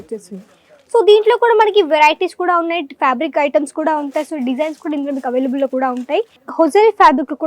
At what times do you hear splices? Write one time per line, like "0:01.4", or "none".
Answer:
0:06.4